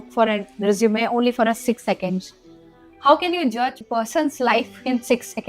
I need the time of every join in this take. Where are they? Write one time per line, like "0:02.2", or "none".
0:03.8